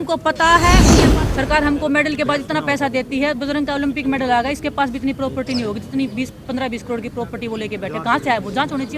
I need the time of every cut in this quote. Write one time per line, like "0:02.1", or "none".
0:01.0